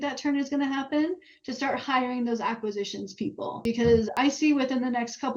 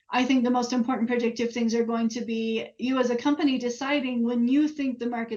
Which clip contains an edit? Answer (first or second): first